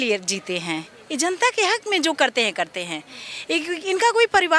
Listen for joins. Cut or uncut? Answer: uncut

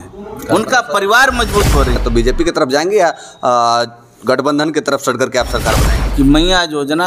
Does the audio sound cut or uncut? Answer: cut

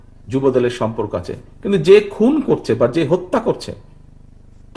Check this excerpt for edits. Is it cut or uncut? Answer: uncut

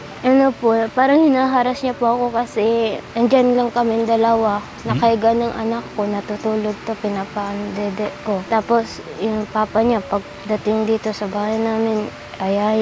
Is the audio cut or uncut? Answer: cut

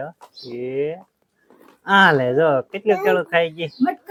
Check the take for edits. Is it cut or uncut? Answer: uncut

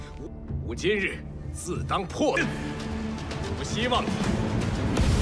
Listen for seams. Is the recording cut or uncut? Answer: uncut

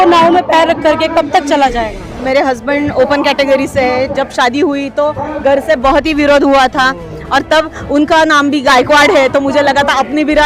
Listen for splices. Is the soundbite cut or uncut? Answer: cut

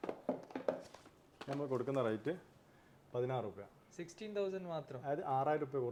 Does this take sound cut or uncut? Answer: uncut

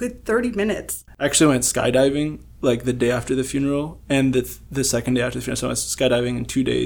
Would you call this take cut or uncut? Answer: cut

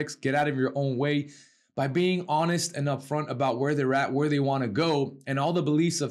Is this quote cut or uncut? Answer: uncut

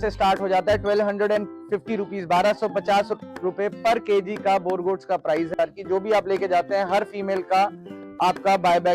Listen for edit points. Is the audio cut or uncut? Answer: cut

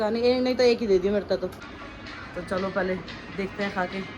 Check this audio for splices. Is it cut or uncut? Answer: cut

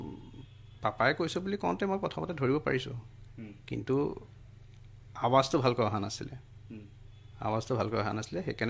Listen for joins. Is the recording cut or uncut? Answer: uncut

